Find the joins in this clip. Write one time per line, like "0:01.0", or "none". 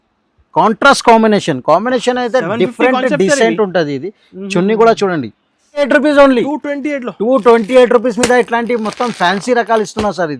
0:05.9